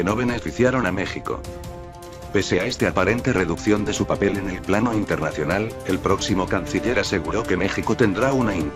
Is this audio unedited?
yes; 0 cuts

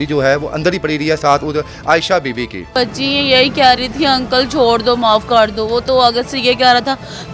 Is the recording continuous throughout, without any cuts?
no; 1 cut; at 2.7 s

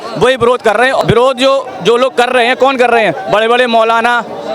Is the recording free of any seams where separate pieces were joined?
no; 1 cut; at 1.0 s

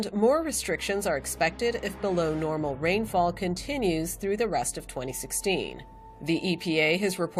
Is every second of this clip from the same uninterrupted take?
yes; 0 cuts

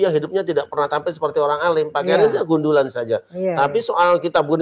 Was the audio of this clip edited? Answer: no; 0 cuts

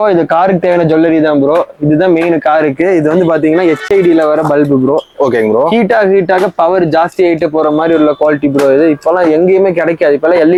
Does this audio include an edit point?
no; 0 cuts

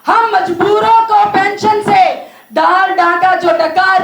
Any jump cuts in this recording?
no; 0 cuts

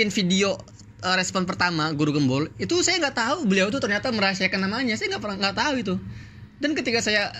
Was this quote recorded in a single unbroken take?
yes; 0 cuts

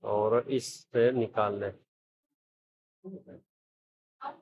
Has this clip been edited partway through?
no; 0 cuts

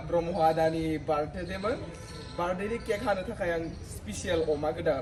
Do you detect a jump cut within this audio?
no; 0 cuts

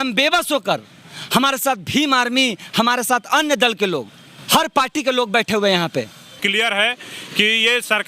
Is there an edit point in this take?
yes; 1 cut; at 6.3 s

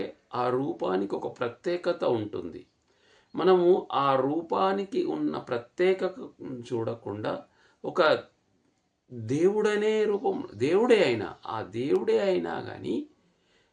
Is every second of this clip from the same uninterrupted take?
yes; 0 cuts

